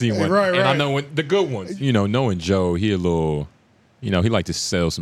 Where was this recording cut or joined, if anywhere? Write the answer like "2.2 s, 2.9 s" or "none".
1.6 s

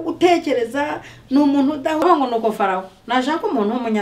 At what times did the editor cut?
2.0 s

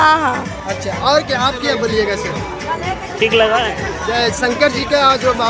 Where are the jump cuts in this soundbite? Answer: none

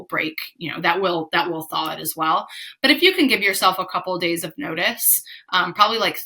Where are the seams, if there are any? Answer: none

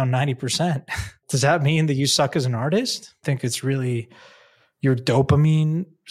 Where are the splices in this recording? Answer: 1.2 s, 3.2 s

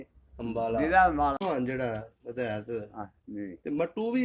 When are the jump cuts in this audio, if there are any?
1.4 s

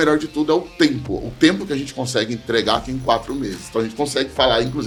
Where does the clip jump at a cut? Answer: none

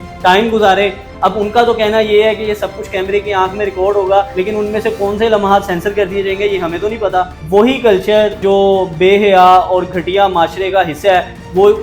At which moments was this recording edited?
1.1 s, 4.3 s, 7.4 s, 8.4 s

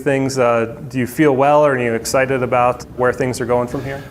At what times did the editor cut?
3.0 s

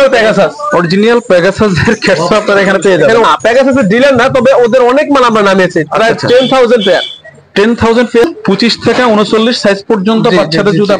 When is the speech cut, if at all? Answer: 3.2 s, 8.2 s

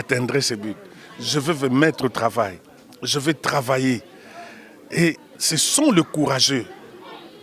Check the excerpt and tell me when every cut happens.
none

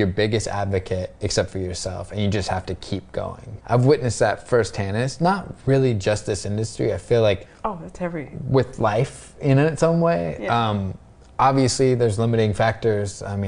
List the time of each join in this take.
3.4 s, 7.5 s

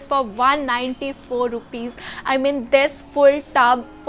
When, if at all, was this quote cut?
none

